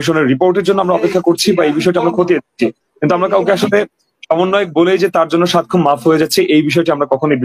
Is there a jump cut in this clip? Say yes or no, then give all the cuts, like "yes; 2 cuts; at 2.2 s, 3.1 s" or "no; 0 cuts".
no; 0 cuts